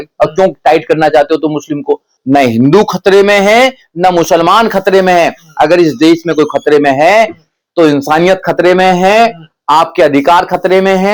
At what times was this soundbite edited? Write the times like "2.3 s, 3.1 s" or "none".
2.1 s